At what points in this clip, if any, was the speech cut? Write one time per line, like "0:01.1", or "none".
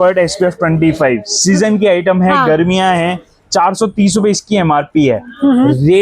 none